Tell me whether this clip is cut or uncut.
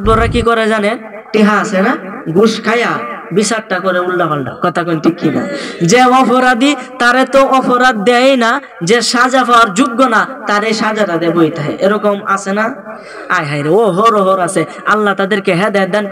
uncut